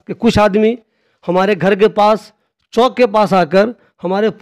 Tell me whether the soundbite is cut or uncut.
uncut